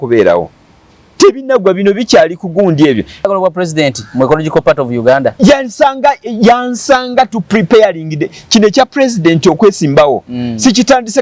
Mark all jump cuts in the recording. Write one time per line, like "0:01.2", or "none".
0:03.3